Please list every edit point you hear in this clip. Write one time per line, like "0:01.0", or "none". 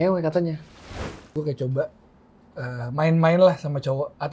0:00.9